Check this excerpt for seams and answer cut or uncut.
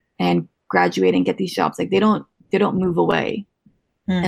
uncut